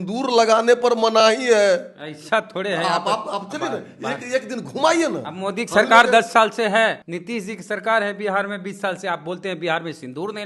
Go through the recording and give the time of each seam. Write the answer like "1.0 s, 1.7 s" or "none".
7.1 s